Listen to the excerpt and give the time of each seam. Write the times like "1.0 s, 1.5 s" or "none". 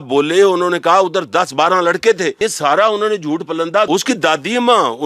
2.3 s, 3.9 s